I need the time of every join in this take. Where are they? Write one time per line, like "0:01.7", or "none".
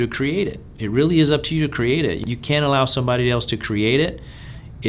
0:02.2